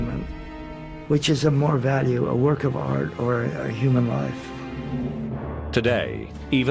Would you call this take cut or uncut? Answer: cut